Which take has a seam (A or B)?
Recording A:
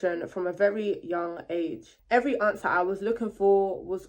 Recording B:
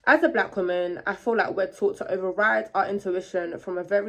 A